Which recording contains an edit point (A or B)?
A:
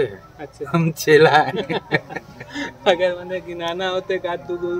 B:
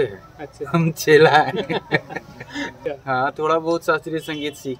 B